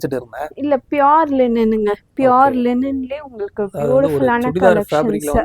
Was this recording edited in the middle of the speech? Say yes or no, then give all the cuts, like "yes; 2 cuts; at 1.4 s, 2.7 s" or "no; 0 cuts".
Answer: no; 0 cuts